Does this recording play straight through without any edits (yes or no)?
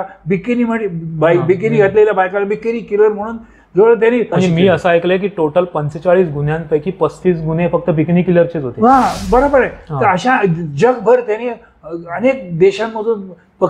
no